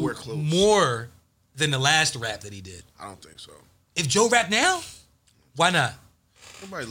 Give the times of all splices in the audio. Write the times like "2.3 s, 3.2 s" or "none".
none